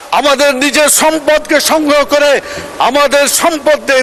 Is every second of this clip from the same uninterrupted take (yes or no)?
yes